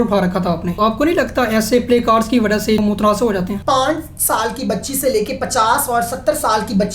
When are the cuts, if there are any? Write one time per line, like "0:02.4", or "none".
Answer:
0:00.8
0:02.8
0:03.6